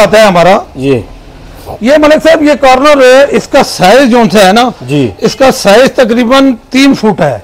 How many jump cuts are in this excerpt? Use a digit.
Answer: 0